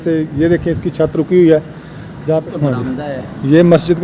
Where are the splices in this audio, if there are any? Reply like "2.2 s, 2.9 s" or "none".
2.4 s